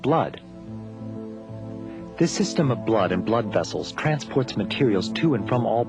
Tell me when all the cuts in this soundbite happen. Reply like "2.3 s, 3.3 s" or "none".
none